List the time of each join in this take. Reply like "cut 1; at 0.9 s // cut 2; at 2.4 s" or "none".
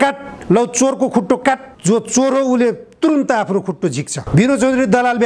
cut 1; at 1.7 s // cut 2; at 4.1 s